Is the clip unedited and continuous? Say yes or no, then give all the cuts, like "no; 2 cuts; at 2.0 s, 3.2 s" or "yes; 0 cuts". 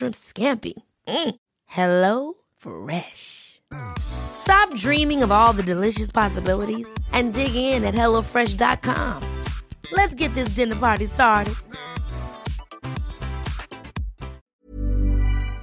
no; 1 cut; at 14.5 s